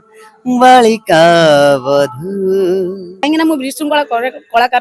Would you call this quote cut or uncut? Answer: cut